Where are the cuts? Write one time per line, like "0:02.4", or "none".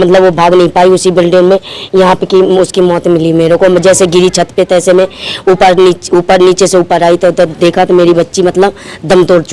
none